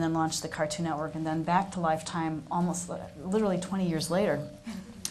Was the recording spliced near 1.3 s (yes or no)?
no